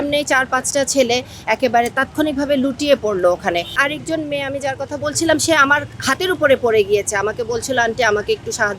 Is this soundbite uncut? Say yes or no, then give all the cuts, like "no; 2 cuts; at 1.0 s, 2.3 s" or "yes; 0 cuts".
no; 1 cut; at 3.8 s